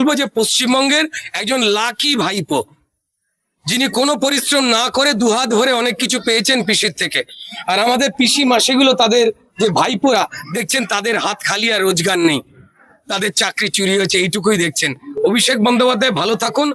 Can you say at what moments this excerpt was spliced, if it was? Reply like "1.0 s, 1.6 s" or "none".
none